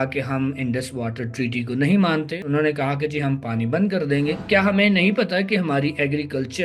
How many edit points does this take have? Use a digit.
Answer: 2